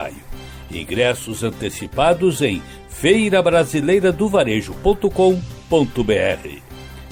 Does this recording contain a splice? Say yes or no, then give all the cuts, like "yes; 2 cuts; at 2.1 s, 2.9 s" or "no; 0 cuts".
no; 0 cuts